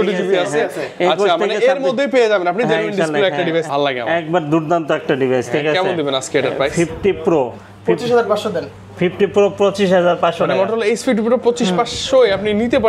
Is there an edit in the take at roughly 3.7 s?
yes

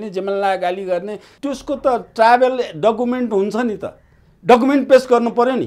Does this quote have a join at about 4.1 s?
no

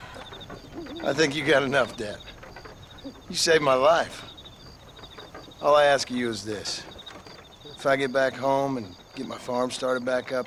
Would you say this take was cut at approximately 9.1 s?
no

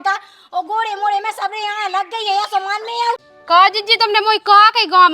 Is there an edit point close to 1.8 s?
no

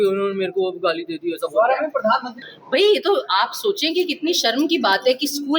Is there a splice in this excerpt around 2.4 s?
yes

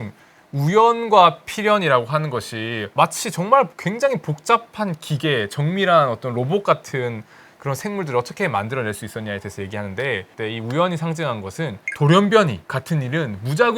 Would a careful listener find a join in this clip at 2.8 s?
yes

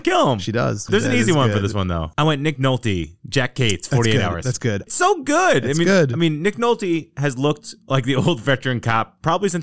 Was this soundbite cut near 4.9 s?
yes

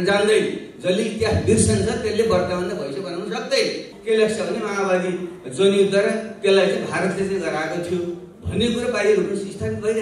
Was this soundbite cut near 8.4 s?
no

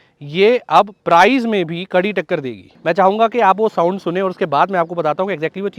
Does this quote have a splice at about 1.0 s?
no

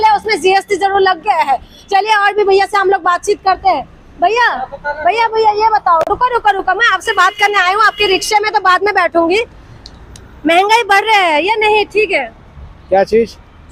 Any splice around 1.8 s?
no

